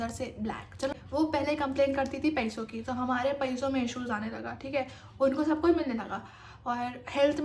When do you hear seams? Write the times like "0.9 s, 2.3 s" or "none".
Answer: 0.9 s